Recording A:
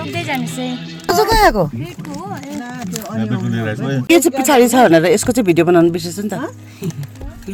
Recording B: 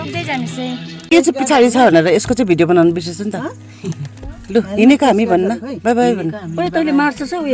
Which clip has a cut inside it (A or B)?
B